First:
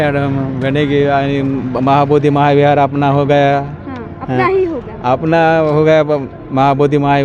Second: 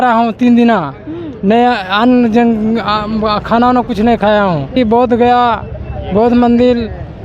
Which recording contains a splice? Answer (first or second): second